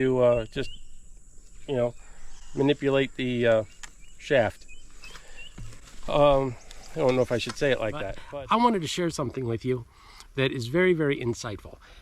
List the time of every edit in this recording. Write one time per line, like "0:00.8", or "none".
0:08.1